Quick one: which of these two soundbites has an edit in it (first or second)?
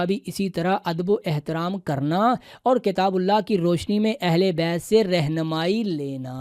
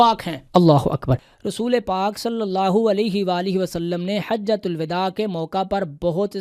second